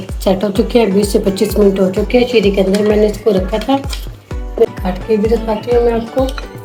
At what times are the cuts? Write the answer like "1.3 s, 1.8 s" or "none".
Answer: none